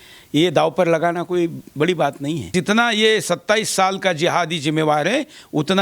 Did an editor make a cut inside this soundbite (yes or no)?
yes